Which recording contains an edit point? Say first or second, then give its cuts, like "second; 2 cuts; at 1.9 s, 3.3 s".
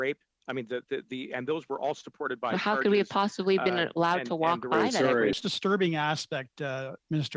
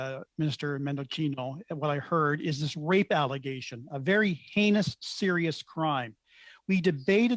first; 1 cut; at 5.3 s